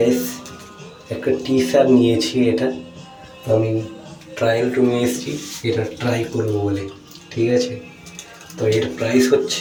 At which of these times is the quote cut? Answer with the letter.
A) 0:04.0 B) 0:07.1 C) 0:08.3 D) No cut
D